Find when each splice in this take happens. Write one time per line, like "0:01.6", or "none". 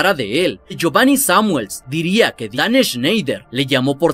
0:00.8
0:02.4